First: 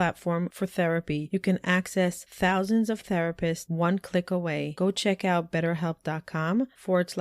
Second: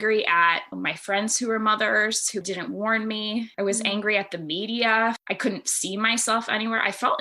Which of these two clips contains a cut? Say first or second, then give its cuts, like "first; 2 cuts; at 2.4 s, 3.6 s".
second; 2 cuts; at 3.5 s, 5.3 s